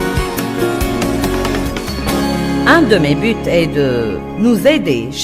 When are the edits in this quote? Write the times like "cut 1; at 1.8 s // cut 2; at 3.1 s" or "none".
cut 1; at 2.7 s